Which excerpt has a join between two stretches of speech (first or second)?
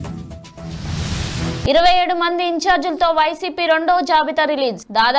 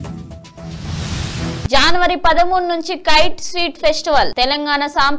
second